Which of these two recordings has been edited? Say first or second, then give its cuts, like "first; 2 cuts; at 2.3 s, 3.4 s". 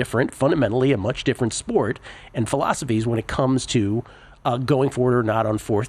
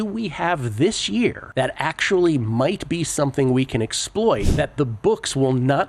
second; 2 cuts; at 1.4 s, 4.5 s